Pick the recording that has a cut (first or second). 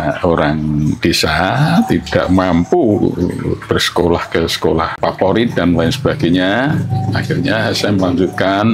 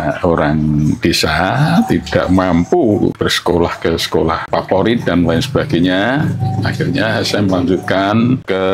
second